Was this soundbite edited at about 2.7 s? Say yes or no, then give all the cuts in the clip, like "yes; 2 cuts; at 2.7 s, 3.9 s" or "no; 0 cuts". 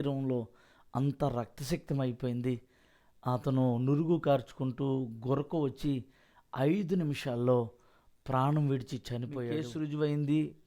no; 1 cut; at 9.4 s